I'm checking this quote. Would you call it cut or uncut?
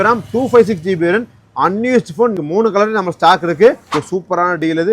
cut